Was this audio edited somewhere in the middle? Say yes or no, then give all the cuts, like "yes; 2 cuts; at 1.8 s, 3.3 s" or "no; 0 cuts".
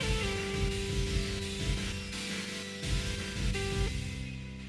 no; 0 cuts